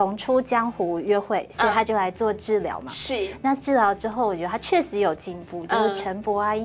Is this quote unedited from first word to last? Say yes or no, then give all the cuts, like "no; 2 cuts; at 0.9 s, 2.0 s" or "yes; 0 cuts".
yes; 0 cuts